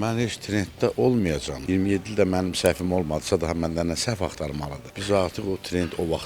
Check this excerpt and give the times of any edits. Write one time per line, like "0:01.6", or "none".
none

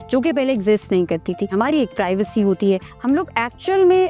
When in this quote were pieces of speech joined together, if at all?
0:01.5
0:02.9

